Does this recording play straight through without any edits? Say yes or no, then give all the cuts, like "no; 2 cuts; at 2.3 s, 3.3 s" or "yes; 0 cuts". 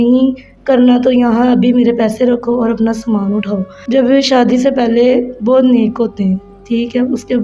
no; 1 cut; at 3.7 s